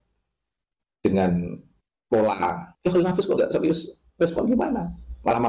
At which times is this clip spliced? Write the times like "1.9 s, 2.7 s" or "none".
2.7 s